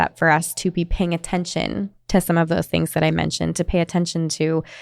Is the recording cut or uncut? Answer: uncut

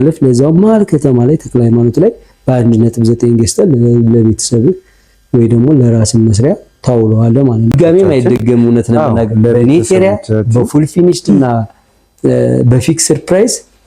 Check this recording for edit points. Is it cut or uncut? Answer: cut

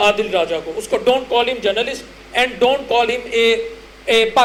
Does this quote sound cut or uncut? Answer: uncut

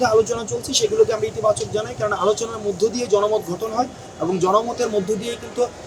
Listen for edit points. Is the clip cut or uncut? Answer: uncut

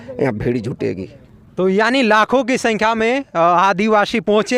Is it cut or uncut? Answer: uncut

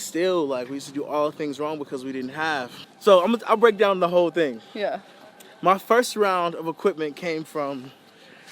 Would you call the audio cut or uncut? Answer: cut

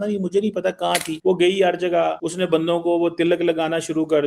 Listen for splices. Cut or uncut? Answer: cut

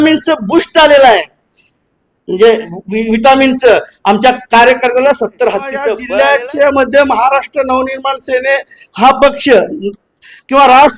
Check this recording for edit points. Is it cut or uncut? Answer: cut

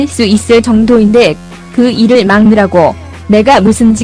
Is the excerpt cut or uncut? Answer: uncut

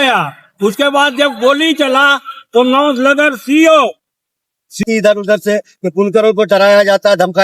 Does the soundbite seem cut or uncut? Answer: cut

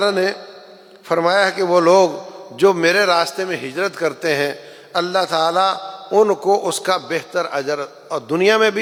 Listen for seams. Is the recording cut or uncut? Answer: uncut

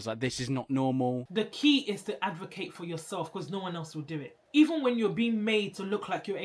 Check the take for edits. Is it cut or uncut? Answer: cut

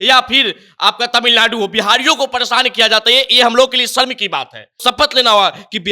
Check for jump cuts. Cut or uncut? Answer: cut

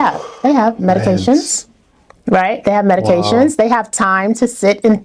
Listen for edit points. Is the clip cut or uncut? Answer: uncut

